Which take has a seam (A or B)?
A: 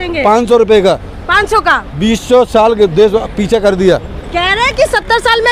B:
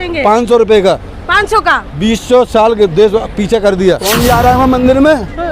B